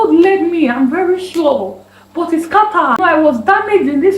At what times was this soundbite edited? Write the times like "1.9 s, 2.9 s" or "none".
3.0 s